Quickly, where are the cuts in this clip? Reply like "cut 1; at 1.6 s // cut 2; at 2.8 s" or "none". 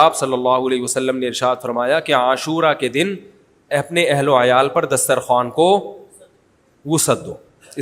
none

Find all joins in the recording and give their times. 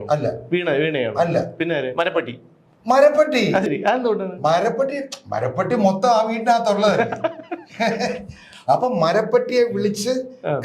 cut 1; at 3.7 s

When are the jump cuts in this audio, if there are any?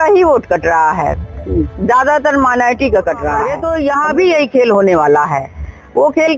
cut 1; at 3.6 s

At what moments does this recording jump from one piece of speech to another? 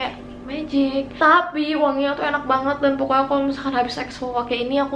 cut 1; at 1.2 s

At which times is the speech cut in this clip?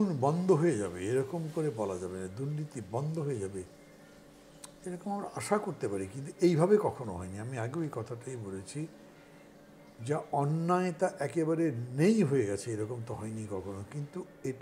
none

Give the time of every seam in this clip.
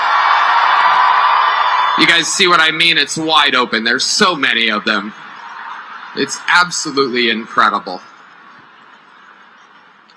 cut 1; at 2.8 s

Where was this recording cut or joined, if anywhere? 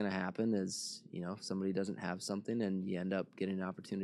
none

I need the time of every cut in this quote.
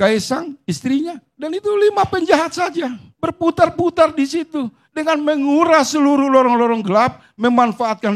none

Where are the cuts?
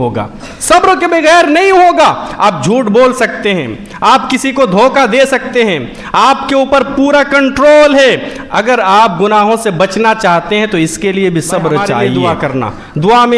cut 1; at 12.1 s

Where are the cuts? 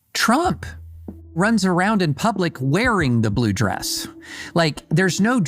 cut 1; at 1.3 s

